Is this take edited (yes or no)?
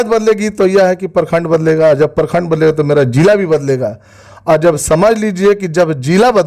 no